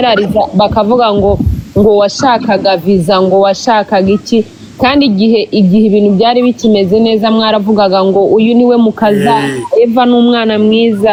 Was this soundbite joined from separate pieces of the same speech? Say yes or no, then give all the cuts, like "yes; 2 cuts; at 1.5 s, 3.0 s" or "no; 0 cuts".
no; 0 cuts